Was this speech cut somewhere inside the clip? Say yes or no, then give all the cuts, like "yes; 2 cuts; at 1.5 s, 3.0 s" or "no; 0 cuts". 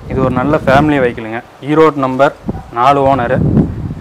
no; 0 cuts